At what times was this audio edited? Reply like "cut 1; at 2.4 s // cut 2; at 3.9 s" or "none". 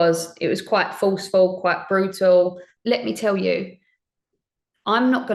cut 1; at 2.7 s